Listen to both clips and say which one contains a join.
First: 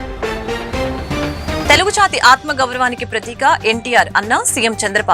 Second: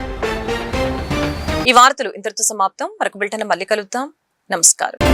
first; 1 cut; at 1.6 s

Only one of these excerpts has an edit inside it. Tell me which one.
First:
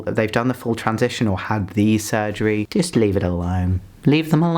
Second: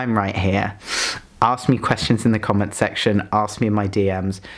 first; 1 cut; at 2.7 s

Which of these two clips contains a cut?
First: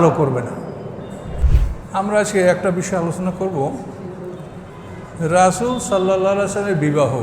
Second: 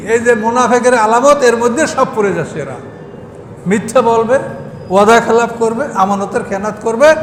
first; 1 cut; at 1.4 s

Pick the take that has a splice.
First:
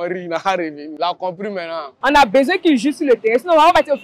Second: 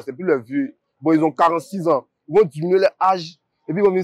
first; 1 cut; at 1.9 s

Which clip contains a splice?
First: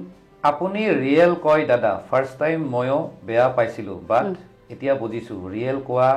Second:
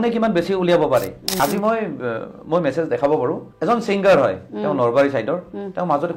second; 2 cuts; at 1.4 s, 3.5 s

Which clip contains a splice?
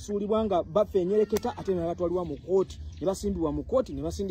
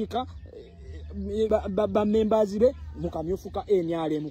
second; 1 cut; at 1.5 s

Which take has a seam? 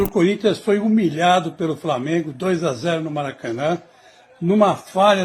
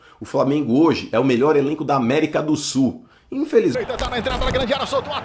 second; 1 cut; at 3.7 s

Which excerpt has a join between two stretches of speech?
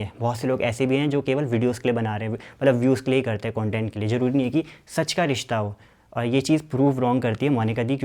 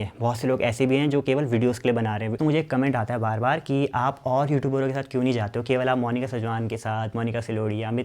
second; 1 cut; at 2.4 s

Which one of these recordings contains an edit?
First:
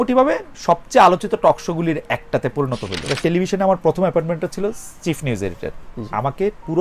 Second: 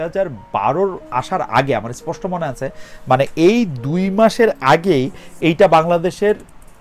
first; 1 cut; at 3.2 s

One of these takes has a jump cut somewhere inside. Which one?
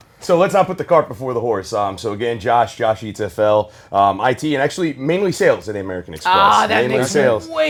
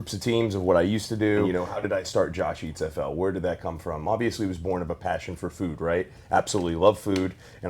second; 1 cut; at 1.5 s

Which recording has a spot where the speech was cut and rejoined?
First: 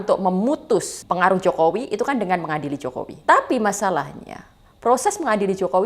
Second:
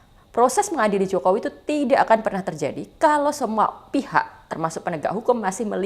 first; 2 cuts; at 1.0 s, 3.2 s

